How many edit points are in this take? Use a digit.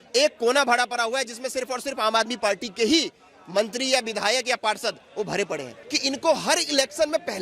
1